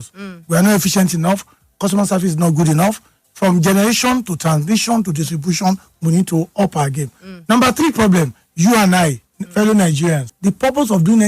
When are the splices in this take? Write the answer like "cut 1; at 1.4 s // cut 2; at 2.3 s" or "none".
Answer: cut 1; at 10.3 s